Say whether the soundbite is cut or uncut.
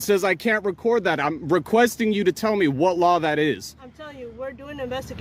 uncut